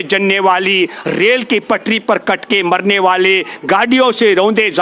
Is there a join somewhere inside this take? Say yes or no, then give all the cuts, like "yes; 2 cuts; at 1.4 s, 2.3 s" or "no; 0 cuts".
no; 0 cuts